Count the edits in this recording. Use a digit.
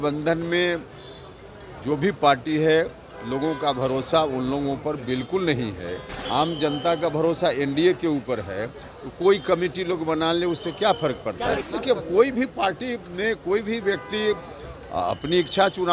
2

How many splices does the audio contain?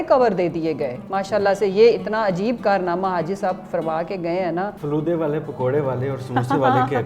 2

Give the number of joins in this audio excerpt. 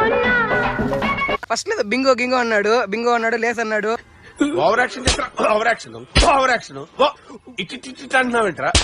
1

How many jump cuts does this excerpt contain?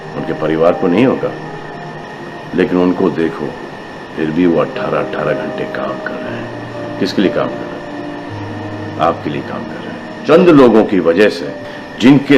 1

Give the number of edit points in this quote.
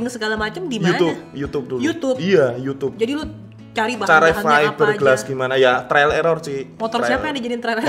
1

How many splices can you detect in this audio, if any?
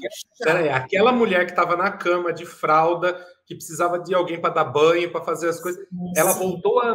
0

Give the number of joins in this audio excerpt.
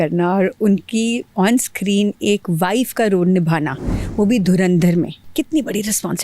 1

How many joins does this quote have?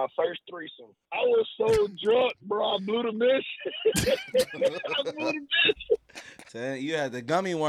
2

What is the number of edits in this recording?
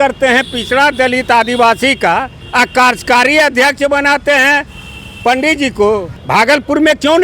1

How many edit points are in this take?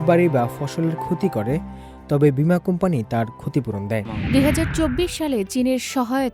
1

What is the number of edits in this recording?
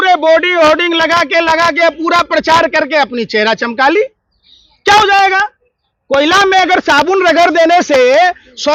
0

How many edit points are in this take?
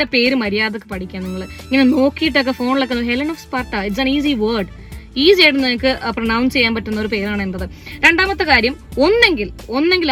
0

